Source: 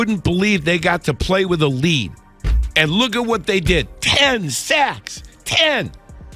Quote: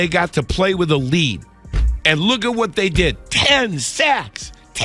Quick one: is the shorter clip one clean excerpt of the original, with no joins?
yes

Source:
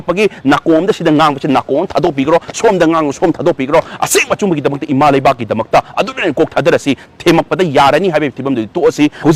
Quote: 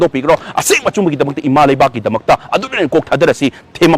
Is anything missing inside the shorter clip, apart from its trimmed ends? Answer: no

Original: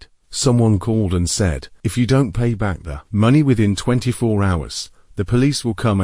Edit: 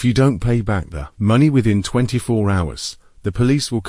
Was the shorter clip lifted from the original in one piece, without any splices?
yes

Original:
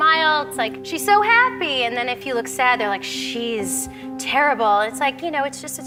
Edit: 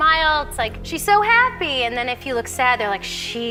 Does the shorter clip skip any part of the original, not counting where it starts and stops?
no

